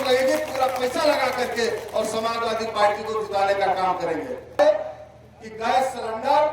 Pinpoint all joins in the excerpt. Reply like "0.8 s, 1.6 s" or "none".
4.6 s